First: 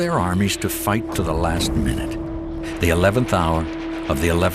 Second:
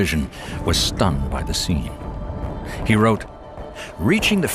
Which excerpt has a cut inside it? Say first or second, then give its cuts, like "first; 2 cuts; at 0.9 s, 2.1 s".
second; 1 cut; at 2.2 s